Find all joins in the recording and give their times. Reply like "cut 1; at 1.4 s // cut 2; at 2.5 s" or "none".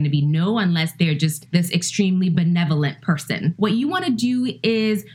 cut 1; at 1.4 s // cut 2; at 3.5 s